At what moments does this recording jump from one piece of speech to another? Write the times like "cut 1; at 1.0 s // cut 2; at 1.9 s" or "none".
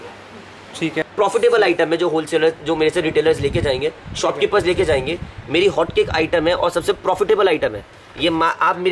cut 1; at 1.0 s